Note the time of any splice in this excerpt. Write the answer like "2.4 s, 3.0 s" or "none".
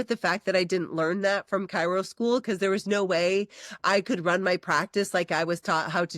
none